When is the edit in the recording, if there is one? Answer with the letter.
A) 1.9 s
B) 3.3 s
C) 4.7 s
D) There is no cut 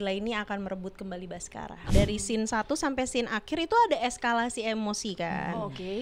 A